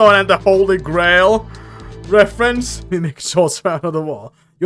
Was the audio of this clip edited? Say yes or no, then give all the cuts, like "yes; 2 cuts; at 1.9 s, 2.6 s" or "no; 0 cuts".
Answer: yes; 1 cut; at 2.8 s